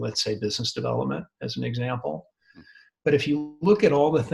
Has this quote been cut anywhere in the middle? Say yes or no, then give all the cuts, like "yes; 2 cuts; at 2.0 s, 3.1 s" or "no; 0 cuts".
no; 0 cuts